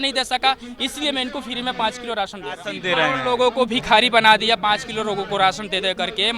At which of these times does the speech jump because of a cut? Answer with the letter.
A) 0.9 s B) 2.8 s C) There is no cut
B